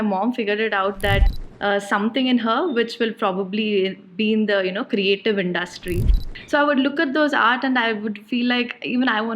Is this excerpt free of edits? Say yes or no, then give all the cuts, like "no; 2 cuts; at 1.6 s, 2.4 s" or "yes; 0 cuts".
no; 2 cuts; at 1.3 s, 6.1 s